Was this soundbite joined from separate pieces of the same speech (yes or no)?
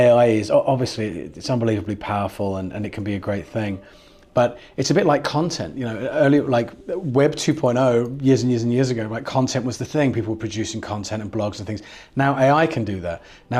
no